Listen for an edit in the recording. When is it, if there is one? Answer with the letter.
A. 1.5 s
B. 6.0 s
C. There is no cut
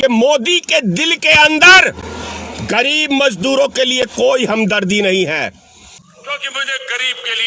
B